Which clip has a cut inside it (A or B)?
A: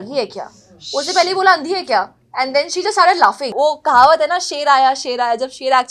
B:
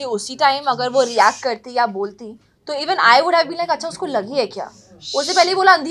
A